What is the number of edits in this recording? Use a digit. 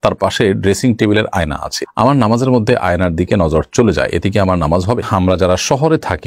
1